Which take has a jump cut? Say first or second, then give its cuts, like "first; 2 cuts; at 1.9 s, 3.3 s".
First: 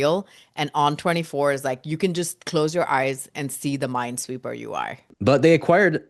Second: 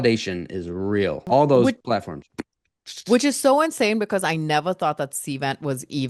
first; 1 cut; at 5.1 s